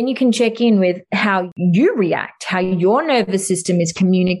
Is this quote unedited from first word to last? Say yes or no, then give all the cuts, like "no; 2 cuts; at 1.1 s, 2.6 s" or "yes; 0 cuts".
no; 1 cut; at 1.5 s